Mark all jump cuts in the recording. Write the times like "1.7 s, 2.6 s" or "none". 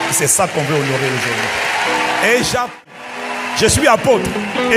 2.8 s

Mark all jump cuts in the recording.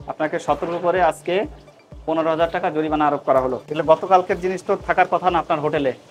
3.6 s

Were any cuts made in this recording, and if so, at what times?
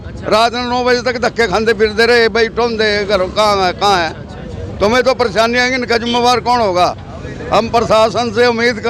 none

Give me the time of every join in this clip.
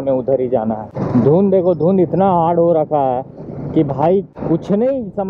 0.9 s, 4.3 s

